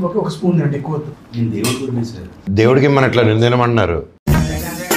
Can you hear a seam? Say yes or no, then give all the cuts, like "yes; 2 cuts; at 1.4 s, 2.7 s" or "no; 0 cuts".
yes; 1 cut; at 2.3 s